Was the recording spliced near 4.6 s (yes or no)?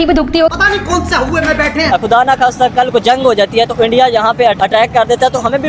yes